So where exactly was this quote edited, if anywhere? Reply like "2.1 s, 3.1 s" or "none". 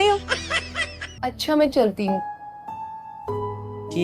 1.1 s